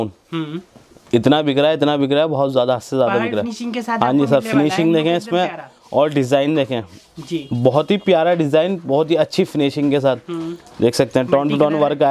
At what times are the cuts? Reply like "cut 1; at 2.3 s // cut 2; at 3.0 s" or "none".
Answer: none